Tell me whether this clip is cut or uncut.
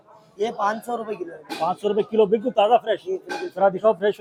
uncut